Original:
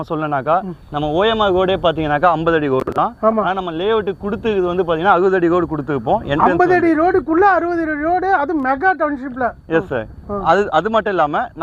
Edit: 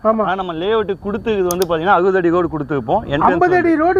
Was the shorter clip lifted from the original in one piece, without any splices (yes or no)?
yes